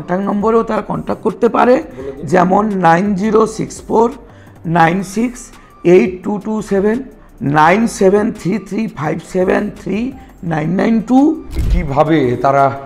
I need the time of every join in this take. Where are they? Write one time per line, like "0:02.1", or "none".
0:11.6